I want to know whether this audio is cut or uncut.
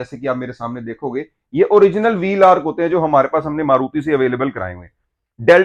uncut